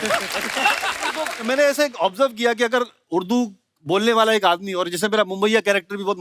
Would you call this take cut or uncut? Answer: cut